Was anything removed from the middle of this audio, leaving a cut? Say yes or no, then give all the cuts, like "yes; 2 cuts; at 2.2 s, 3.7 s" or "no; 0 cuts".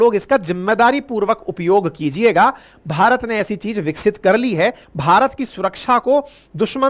yes; 1 cut; at 4.8 s